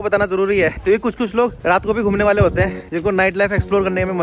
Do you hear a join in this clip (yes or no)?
no